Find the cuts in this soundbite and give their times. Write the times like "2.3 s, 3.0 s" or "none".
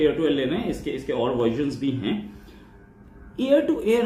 none